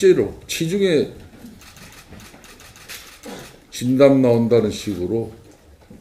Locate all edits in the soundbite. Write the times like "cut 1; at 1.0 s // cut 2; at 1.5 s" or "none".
cut 1; at 1.5 s